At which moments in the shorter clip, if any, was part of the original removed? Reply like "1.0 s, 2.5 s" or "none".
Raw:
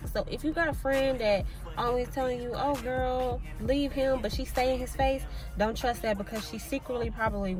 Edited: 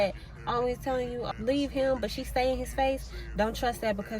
1.2 s

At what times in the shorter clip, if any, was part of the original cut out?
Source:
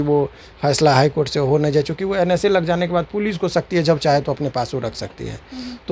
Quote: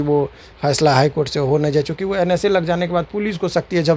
none

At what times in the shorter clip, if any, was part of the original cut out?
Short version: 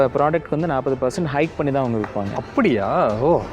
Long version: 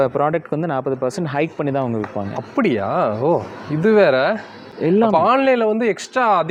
none

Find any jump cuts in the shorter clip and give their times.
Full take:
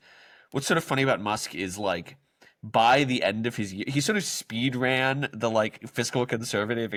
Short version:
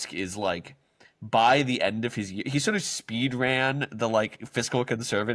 none

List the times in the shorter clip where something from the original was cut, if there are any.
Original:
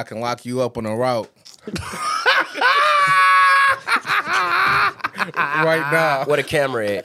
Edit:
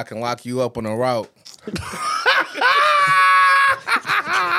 none

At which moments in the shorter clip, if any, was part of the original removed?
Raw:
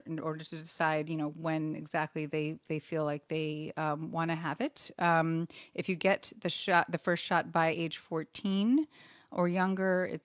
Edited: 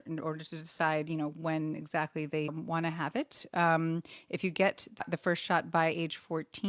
2.5 s, 5.0 s

